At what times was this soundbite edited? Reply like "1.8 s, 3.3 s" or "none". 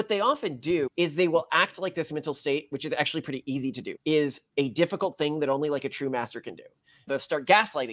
0.9 s, 3.9 s, 7.0 s